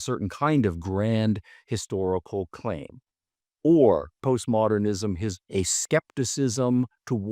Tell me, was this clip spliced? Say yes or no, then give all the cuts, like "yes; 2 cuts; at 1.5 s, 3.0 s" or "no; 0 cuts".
yes; 2 cuts; at 4.1 s, 5.4 s